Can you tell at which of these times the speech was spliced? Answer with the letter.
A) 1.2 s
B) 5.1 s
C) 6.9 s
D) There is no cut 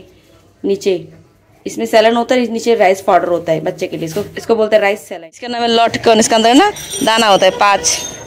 B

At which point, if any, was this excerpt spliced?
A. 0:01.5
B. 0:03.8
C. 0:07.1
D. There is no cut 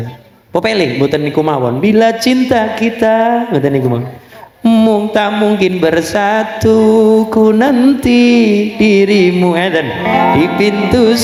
D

